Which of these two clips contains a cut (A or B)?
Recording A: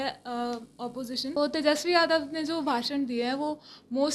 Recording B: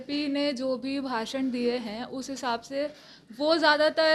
A